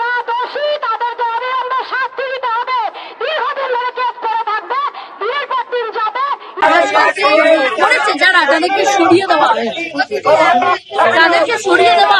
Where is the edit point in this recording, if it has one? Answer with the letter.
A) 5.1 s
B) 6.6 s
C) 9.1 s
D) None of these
B